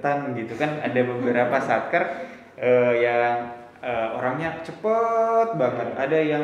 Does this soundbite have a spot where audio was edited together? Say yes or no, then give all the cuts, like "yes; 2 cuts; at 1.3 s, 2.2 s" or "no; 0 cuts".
no; 0 cuts